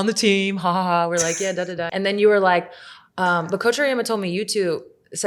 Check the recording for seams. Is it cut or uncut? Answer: cut